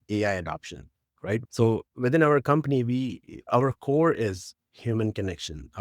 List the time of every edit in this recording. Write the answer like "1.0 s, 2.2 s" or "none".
1.4 s